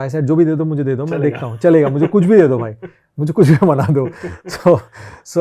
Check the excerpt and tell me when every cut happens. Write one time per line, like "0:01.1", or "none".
none

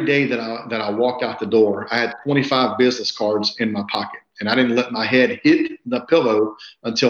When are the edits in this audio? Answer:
none

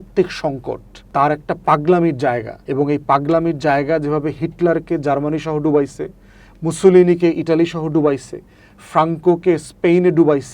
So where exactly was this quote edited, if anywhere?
0:00.9
0:02.5

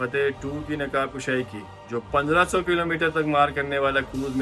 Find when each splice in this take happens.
none

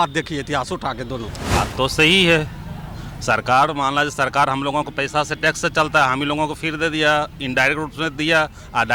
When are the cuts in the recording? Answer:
0:01.4

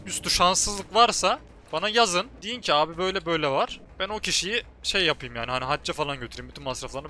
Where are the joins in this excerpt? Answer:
0:01.5
0:02.4
0:03.8

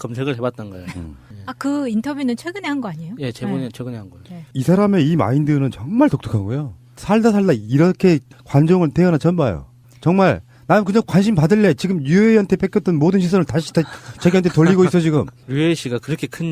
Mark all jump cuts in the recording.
0:06.6

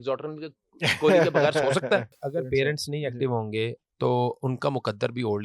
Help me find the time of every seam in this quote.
0:02.2

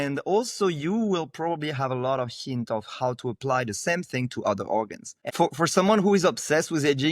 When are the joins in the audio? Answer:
0:05.3

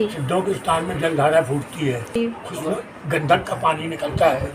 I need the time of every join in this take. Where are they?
0:02.2

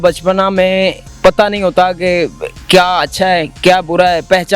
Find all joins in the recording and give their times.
0:01.1

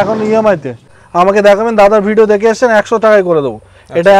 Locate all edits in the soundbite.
0:01.0

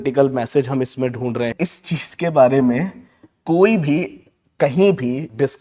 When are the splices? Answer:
0:01.5

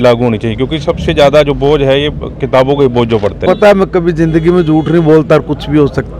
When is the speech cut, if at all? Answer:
0:03.4

